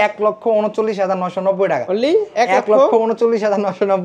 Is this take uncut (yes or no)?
yes